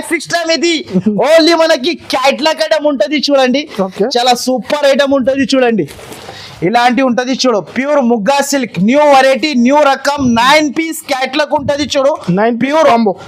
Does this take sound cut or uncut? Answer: uncut